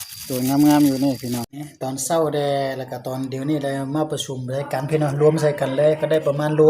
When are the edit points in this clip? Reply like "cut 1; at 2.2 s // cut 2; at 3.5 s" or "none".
cut 1; at 1.5 s